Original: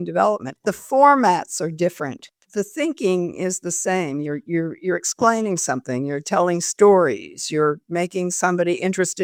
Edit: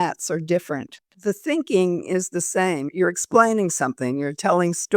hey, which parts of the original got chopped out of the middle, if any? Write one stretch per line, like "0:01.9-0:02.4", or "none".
0:04.2-0:04.8